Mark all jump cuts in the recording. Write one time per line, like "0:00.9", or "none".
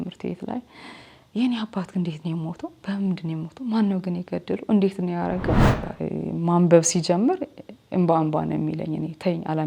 0:05.8